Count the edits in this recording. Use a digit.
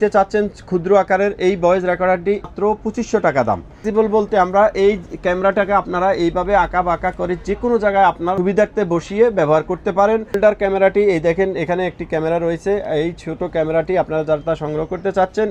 4